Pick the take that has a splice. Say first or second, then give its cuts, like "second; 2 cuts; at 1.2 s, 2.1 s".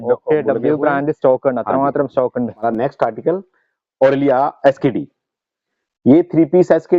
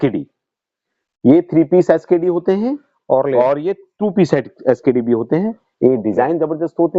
first; 1 cut; at 2.6 s